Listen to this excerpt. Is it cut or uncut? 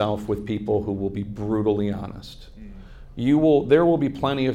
uncut